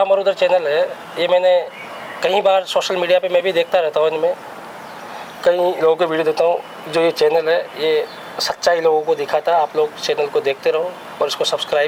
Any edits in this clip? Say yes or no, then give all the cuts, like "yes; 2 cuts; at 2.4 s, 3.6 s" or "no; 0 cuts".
no; 0 cuts